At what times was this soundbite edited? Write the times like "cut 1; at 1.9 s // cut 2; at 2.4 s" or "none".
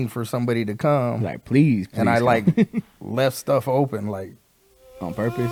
none